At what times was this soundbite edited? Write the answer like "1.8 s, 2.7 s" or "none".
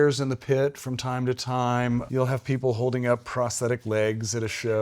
none

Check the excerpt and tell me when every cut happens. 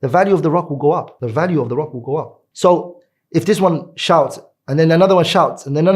1.1 s, 2.4 s

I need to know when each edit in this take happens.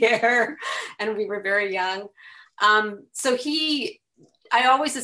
none

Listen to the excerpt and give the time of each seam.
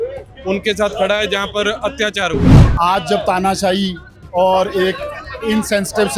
2.6 s

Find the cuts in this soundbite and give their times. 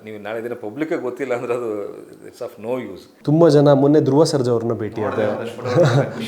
3.0 s

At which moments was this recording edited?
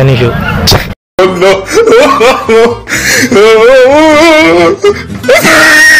1.0 s

